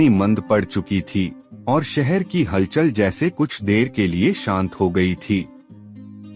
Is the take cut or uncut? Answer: uncut